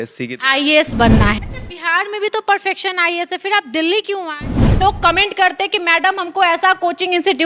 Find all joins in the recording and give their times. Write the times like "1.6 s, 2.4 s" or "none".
1.4 s, 4.8 s

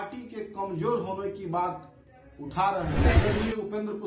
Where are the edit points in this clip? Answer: 3.1 s

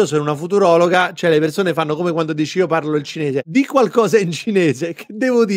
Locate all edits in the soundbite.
3.5 s

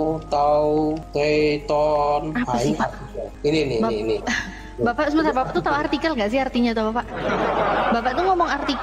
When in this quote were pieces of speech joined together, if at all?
none

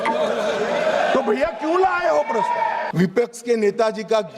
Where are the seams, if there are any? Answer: 2.9 s

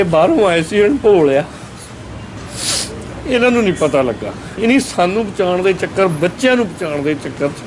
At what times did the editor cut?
none

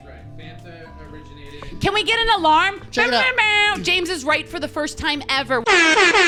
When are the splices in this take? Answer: none

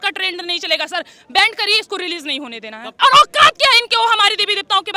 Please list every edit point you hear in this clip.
3.0 s

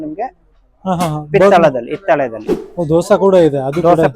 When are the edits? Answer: 2.4 s

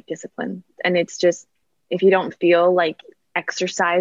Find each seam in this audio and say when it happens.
none

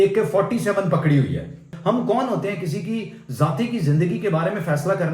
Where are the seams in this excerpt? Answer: 1.7 s

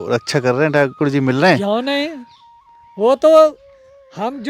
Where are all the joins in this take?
none

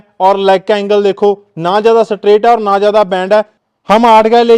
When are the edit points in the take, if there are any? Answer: 3.6 s

